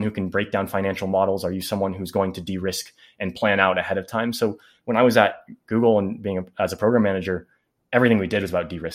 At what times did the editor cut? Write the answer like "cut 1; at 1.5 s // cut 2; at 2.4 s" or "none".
none

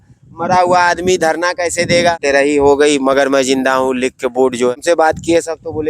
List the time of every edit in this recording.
cut 1; at 2.2 s // cut 2; at 4.8 s

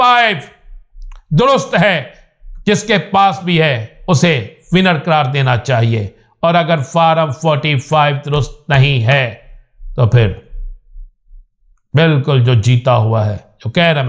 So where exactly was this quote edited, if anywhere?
none

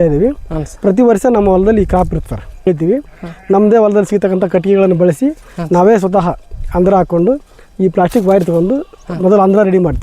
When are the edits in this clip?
cut 1; at 2.7 s

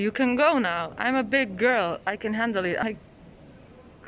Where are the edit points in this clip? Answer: cut 1; at 2.8 s

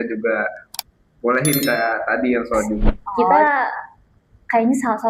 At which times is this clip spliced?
cut 1; at 3.1 s

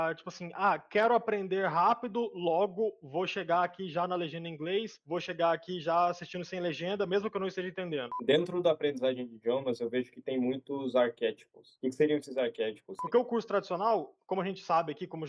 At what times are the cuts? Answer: cut 1; at 8.1 s // cut 2; at 13.0 s

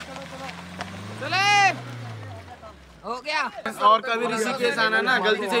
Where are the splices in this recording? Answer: cut 1; at 3.7 s

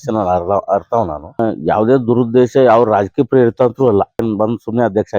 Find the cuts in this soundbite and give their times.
cut 1; at 1.4 s // cut 2; at 4.2 s

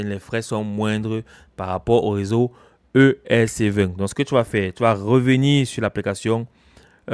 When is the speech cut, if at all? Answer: none

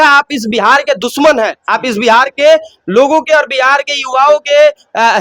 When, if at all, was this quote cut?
none

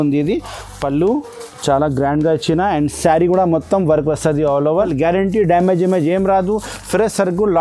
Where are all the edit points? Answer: cut 1; at 4.7 s

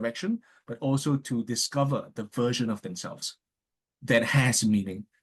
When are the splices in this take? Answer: none

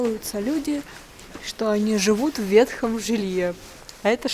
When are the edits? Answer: none

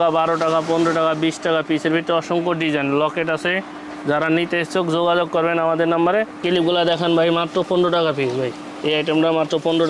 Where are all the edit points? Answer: none

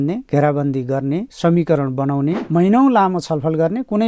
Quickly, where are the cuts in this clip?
cut 1; at 2.4 s

